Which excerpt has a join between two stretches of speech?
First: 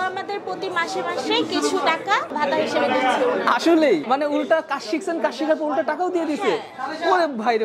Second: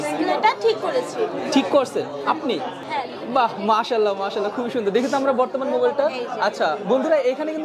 first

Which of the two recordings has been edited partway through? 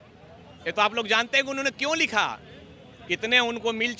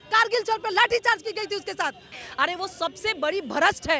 second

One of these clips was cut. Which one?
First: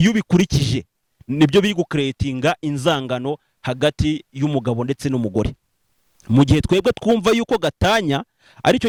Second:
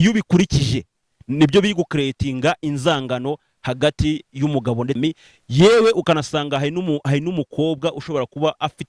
second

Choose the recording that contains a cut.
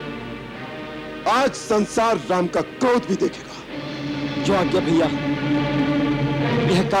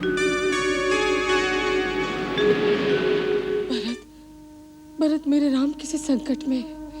second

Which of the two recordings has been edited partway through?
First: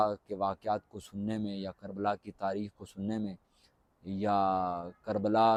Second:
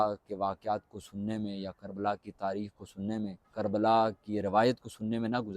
second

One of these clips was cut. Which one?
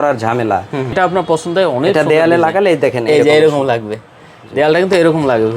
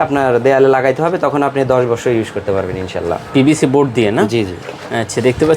first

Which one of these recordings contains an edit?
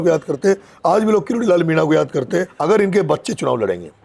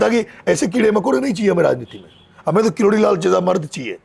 first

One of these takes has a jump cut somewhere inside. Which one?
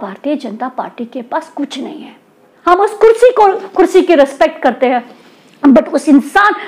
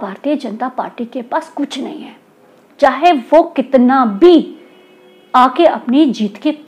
first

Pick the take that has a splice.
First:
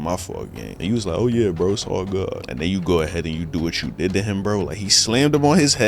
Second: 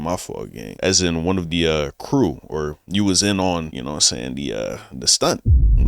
first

